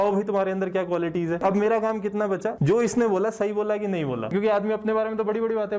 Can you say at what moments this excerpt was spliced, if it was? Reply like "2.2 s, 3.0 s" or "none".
1.4 s, 2.5 s, 4.3 s